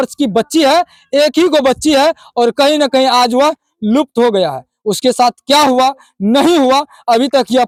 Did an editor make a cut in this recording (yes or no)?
no